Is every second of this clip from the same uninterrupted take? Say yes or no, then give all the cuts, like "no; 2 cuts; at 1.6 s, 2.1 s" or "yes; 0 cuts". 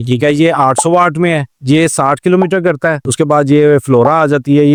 yes; 0 cuts